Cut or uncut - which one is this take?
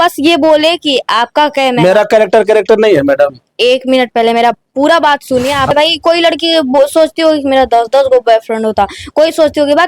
cut